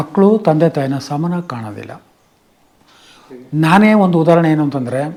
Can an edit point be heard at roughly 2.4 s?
no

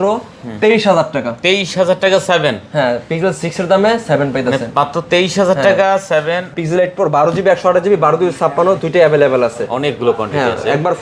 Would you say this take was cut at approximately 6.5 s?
yes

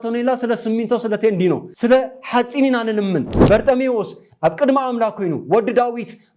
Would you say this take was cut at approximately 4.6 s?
no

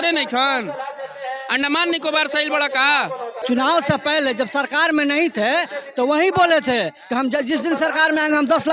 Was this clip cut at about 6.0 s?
no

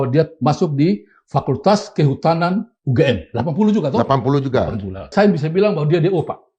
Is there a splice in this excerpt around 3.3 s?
no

